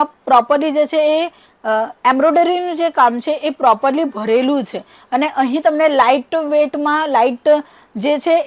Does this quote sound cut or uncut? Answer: uncut